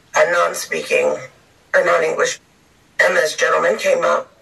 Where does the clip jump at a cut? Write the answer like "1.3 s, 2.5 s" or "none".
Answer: 2.3 s